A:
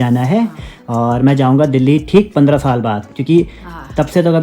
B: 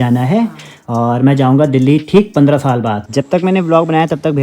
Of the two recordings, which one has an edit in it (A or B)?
B